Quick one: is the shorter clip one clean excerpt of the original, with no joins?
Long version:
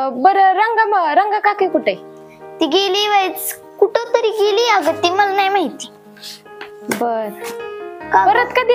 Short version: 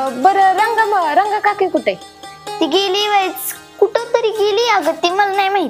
yes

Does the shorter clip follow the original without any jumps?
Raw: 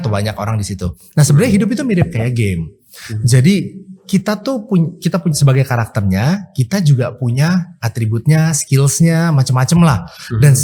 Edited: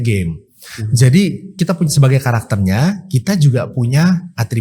no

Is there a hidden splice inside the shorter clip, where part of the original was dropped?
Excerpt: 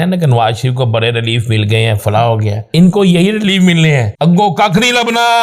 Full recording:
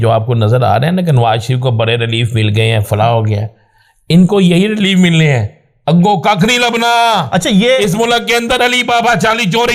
yes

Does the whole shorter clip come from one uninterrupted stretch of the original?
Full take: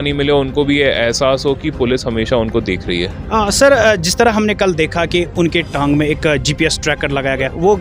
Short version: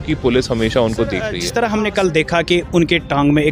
no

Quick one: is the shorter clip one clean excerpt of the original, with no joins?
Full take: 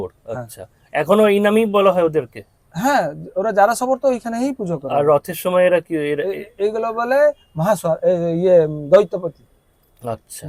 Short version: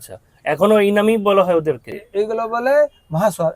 no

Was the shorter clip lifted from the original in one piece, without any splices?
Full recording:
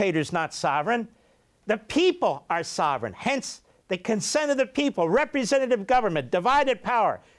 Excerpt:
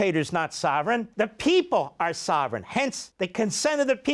no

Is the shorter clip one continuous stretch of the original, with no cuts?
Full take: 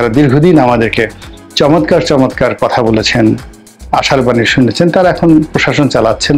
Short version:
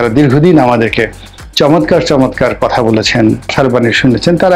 no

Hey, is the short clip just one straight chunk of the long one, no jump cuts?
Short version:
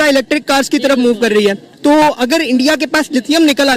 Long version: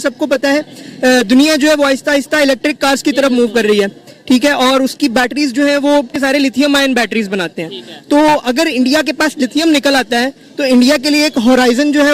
no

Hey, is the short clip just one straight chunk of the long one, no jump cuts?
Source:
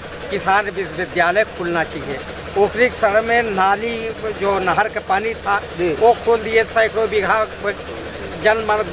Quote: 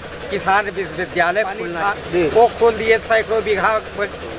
no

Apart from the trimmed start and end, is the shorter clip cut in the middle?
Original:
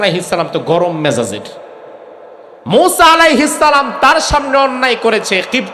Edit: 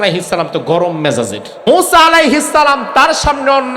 yes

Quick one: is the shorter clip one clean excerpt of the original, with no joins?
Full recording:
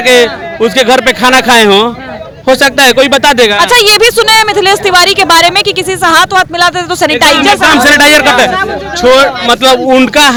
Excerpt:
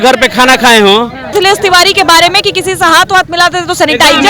no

